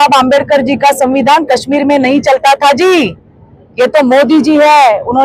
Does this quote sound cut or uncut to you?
uncut